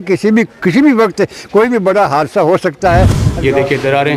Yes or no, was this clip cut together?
yes